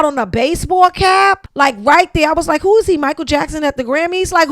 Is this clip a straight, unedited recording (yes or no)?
no